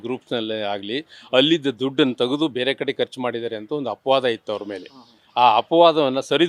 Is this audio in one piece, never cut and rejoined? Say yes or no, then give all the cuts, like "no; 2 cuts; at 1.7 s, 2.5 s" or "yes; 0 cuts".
yes; 0 cuts